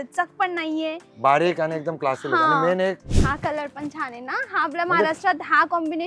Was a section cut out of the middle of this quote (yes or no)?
yes